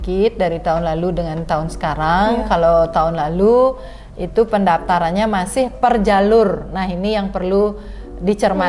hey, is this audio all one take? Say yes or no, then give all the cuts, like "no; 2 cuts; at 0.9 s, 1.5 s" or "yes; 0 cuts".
yes; 0 cuts